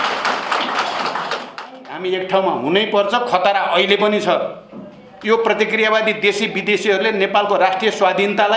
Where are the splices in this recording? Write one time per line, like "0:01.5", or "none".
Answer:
0:01.9

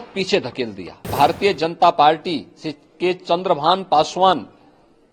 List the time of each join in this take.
0:01.1

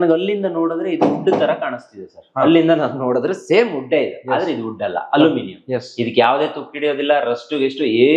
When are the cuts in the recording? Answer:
none

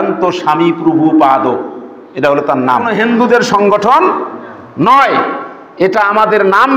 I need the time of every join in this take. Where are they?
0:02.9

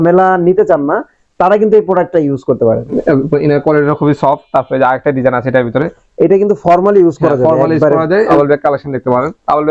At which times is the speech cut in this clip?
0:02.9
0:08.3

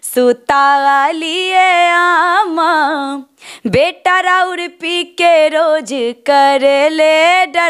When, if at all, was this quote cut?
none

